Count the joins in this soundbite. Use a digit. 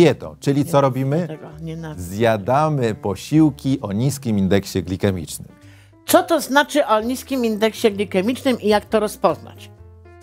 0